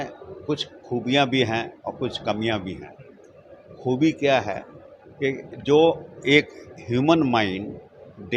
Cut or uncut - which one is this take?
uncut